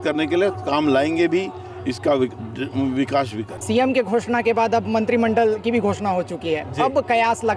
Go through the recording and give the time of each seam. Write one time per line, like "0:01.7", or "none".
0:03.5